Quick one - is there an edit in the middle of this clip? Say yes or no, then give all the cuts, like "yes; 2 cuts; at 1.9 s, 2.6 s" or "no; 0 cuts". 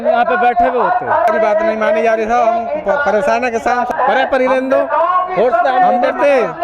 yes; 2 cuts; at 1.3 s, 3.9 s